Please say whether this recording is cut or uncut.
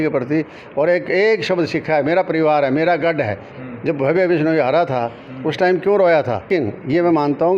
cut